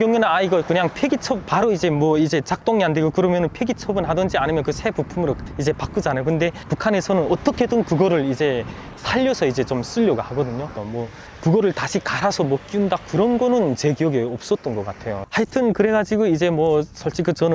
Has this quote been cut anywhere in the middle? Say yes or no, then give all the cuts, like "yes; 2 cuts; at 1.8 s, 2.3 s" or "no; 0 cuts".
no; 0 cuts